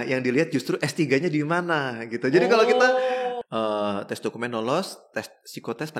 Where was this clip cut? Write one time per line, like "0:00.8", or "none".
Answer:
0:03.3